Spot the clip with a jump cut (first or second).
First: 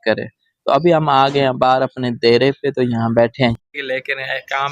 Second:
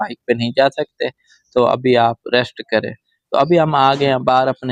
first